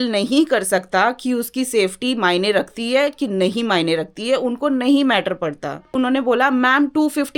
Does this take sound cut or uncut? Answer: cut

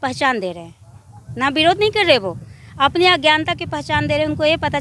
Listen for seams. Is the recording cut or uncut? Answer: uncut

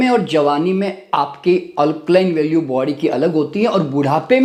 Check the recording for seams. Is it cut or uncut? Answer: uncut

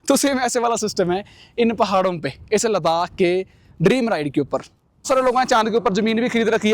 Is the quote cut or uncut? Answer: cut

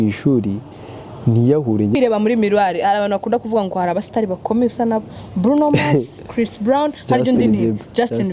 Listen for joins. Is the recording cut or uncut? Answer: cut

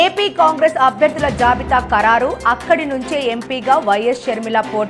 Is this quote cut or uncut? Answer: uncut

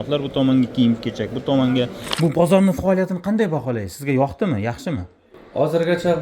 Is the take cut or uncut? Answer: cut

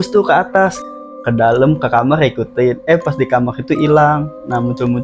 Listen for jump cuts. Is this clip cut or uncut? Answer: uncut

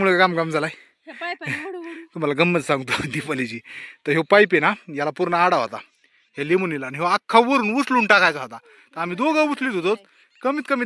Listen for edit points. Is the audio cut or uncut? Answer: uncut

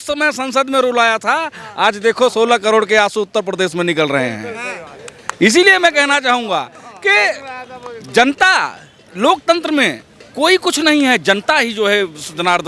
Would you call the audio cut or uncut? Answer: uncut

